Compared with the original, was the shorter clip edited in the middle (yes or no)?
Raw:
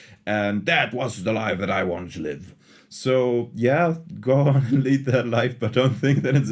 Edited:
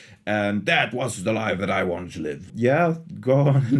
yes